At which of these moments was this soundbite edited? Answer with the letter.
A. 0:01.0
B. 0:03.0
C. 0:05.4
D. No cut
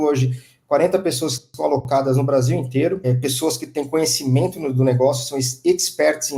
B